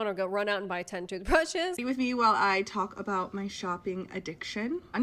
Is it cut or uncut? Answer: cut